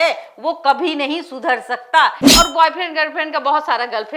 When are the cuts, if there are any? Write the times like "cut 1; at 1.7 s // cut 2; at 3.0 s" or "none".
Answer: cut 1; at 2.2 s